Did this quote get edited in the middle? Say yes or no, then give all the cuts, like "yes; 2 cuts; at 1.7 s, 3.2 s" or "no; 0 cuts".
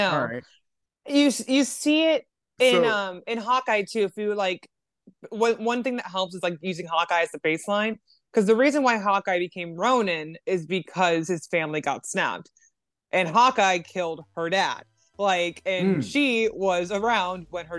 no; 0 cuts